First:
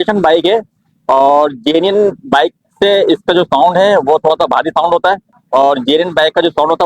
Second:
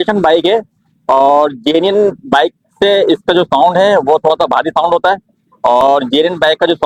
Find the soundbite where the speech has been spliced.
first; 1 cut; at 5.6 s

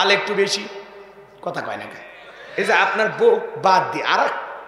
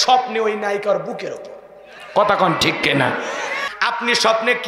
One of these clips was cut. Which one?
second; 1 cut; at 3.7 s

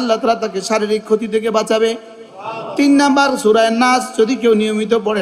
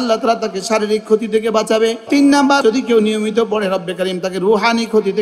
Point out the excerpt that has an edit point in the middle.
second; 1 cut; at 2.5 s

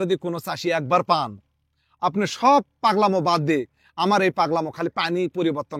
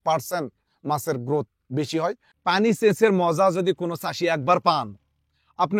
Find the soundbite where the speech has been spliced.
second; 1 cut; at 2.3 s

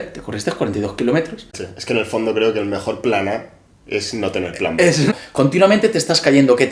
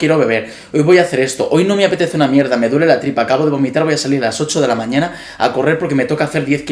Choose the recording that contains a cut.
first; 2 cuts; at 1.6 s, 5.1 s

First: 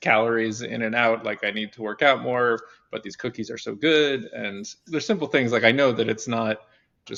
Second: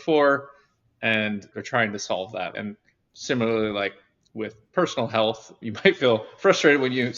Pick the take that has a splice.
second; 2 cuts; at 1.5 s, 2.5 s

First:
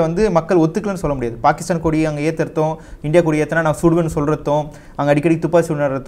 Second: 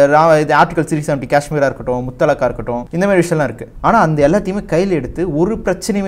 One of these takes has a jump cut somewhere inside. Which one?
second; 2 cuts; at 2.9 s, 3.6 s

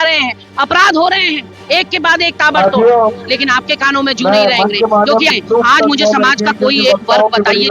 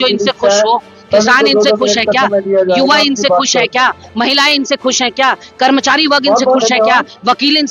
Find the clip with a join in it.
first; 1 cut; at 5.3 s

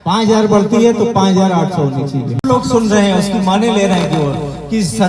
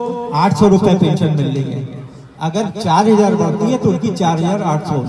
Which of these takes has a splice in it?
first; 1 cut; at 2.4 s

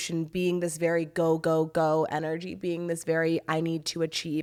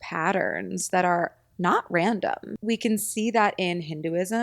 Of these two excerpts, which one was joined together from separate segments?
second; 1 cut; at 2.5 s

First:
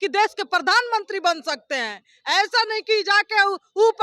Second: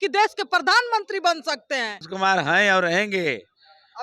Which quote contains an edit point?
second; 1 cut; at 2.1 s

